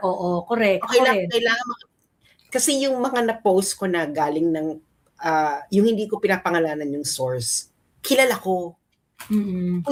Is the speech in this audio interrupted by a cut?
no; 0 cuts

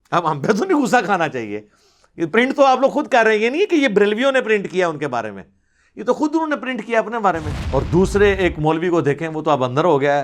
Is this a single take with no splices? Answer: no; 1 cut; at 7.5 s

